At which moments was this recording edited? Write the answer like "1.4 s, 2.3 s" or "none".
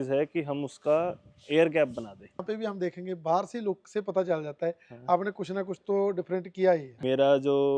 2.4 s, 6.9 s